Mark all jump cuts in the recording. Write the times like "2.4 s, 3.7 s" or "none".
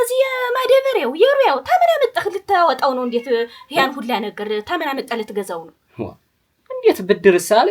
none